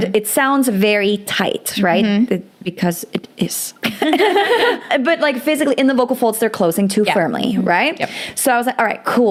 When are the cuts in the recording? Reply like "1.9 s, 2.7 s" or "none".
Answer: none